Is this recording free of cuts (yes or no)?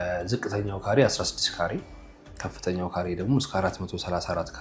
yes